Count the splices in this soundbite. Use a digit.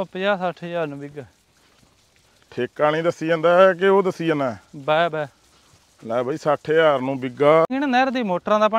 1